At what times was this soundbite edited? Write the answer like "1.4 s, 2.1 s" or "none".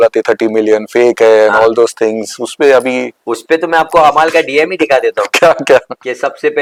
none